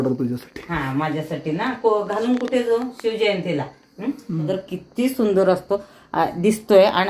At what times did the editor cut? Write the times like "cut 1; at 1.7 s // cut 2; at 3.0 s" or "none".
cut 1; at 4.4 s